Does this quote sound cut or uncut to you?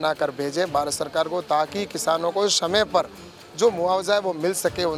uncut